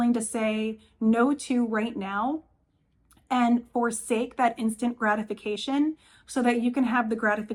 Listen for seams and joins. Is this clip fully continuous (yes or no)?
yes